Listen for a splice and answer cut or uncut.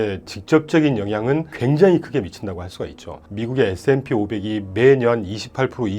cut